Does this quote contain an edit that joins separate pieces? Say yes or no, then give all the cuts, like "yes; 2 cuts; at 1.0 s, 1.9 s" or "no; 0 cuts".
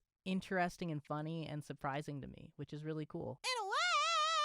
yes; 1 cut; at 3.4 s